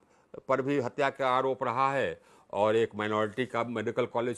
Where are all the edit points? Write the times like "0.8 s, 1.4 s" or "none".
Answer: none